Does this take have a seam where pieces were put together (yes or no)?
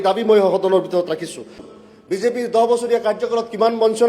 yes